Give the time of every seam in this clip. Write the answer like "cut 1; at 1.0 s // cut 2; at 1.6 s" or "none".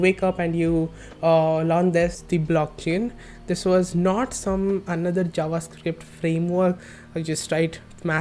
cut 1; at 2.2 s // cut 2; at 6.9 s